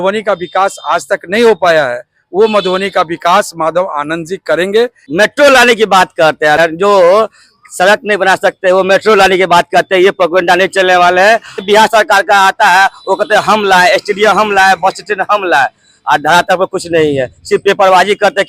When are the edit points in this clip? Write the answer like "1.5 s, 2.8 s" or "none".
5.0 s, 6.6 s, 11.6 s